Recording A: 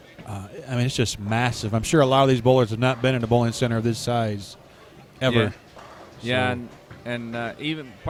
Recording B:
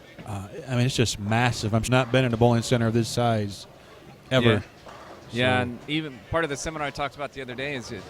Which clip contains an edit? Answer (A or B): B